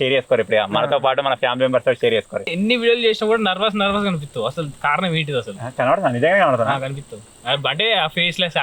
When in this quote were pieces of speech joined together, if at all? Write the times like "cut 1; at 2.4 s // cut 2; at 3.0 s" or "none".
cut 1; at 2.5 s